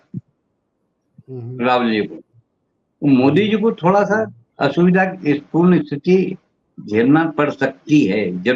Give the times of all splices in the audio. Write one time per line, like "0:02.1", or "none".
none

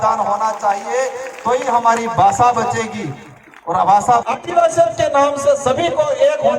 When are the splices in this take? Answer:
0:04.2

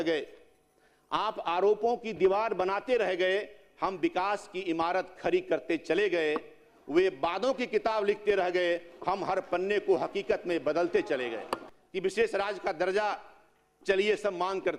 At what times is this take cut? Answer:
0:11.7

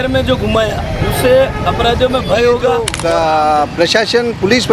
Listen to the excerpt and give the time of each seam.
0:02.9

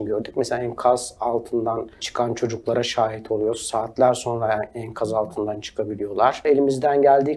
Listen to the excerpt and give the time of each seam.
0:02.0
0:06.5

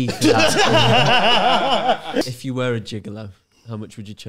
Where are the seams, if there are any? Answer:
0:02.2

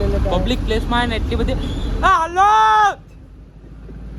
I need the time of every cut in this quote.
none

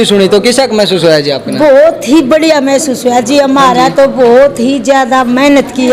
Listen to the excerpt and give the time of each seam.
none

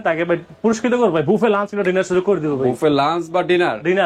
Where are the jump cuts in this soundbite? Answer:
none

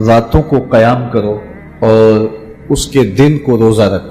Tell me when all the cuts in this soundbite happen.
0:01.9

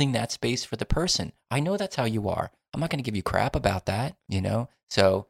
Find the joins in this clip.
0:04.2

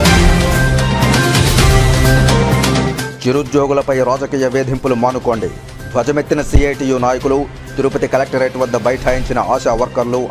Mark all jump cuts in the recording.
none

